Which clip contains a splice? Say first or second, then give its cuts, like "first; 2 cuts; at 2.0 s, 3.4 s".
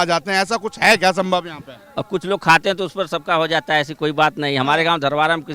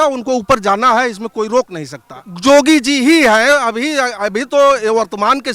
second; 1 cut; at 2.2 s